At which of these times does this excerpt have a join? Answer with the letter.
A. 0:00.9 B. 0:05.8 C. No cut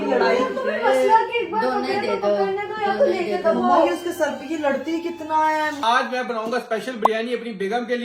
B